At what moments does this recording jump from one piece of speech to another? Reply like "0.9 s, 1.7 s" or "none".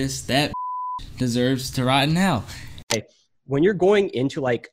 2.9 s